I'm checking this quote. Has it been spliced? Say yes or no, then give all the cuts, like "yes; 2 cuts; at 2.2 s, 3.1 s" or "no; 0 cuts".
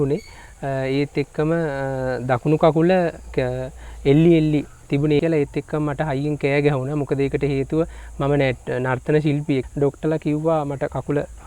yes; 2 cuts; at 5.2 s, 9.7 s